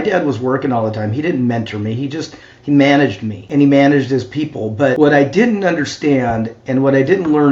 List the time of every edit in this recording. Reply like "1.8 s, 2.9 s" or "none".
3.4 s, 4.9 s